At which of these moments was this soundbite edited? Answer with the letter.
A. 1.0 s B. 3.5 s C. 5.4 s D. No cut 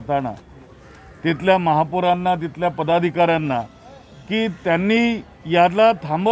D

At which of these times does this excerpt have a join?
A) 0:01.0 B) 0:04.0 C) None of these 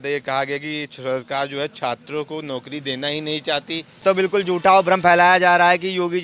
B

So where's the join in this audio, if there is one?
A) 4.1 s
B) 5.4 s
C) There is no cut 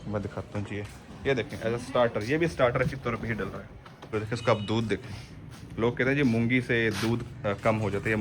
A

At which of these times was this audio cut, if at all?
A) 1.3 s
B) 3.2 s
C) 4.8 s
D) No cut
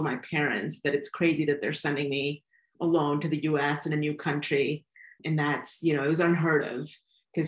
D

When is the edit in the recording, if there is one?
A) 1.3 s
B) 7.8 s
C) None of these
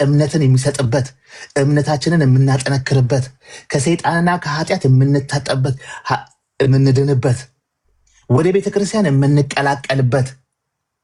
C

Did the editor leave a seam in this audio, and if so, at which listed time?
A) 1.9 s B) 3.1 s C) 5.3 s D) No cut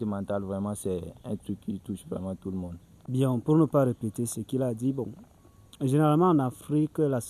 D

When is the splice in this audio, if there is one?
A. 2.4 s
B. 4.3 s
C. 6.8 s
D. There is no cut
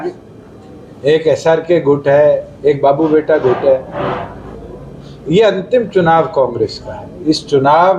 B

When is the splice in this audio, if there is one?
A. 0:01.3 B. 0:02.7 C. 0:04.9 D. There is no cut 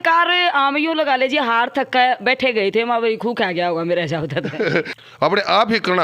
C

